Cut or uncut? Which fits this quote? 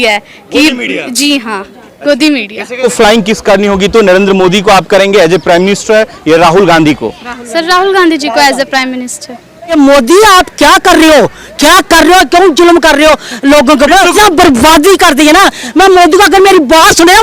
cut